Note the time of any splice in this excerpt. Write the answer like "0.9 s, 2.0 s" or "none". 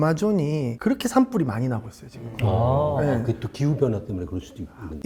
none